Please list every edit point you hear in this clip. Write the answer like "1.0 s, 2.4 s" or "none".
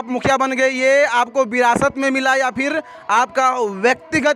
none